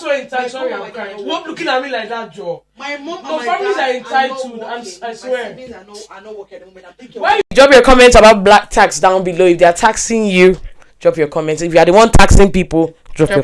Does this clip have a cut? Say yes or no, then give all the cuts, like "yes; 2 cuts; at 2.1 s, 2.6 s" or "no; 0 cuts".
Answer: yes; 1 cut; at 7.5 s